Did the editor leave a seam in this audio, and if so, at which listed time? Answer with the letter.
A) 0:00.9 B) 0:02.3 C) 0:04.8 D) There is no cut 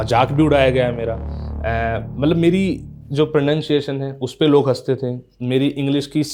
D